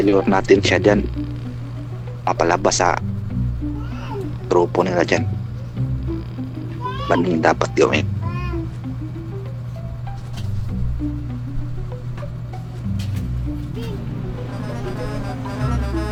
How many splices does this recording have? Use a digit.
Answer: 0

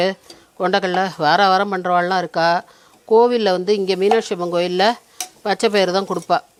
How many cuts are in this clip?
0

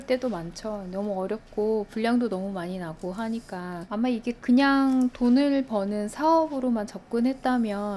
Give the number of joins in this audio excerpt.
0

